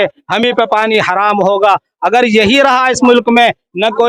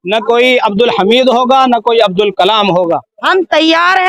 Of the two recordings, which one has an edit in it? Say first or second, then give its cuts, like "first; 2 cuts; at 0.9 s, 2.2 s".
second; 1 cut; at 3.1 s